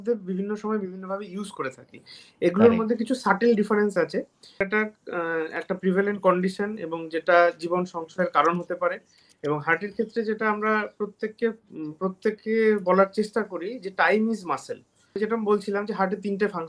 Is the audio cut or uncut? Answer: cut